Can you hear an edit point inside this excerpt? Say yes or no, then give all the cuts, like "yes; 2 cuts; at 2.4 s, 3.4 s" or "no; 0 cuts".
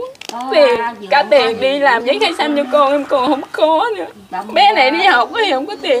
no; 0 cuts